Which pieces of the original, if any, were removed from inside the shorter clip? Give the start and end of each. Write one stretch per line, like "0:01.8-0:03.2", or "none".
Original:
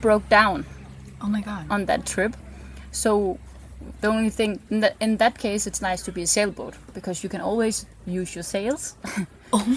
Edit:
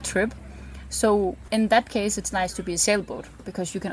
0:03.5-0:05.0

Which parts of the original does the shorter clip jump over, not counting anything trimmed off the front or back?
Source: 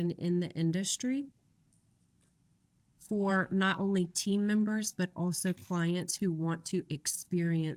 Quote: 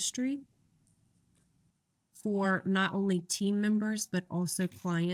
none

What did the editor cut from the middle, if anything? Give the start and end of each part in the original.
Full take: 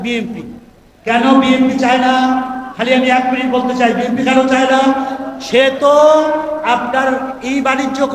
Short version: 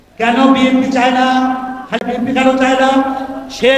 0:02.9-0:03.9

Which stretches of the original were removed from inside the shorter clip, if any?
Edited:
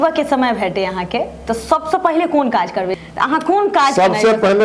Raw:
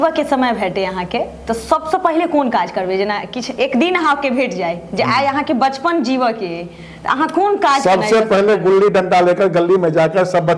0:02.9-0:06.8

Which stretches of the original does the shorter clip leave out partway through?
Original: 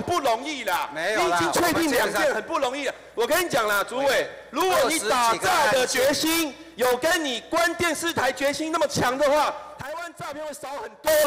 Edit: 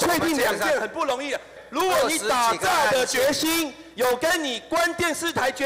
0:03.1-0:04.3

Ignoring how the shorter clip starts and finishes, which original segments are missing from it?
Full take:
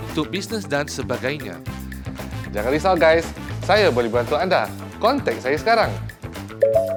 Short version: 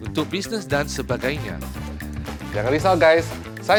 none

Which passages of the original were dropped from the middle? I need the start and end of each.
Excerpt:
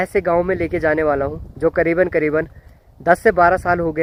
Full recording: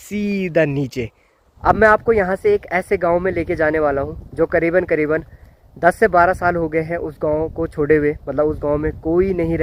none

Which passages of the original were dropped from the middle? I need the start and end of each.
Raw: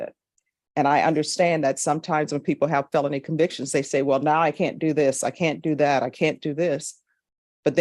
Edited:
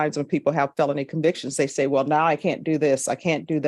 none

